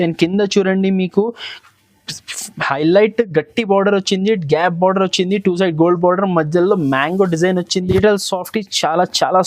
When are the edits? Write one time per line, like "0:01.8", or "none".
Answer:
0:07.9